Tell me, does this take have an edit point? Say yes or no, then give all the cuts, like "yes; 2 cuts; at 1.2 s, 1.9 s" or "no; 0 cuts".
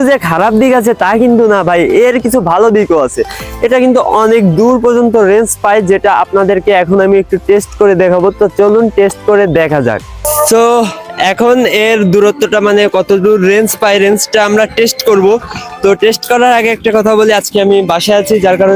no; 0 cuts